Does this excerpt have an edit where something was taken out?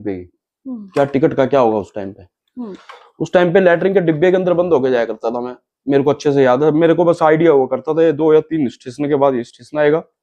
no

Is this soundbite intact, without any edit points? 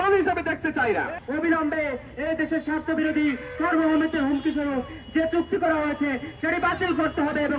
no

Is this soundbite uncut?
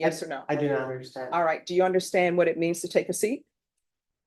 yes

